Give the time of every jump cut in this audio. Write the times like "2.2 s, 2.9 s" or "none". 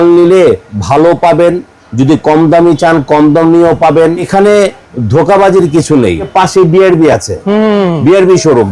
4.3 s, 6.3 s